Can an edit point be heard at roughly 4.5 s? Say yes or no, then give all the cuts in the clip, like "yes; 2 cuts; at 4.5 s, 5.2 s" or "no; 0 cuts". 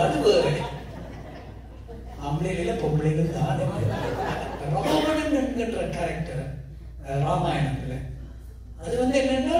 yes; 1 cut; at 4.5 s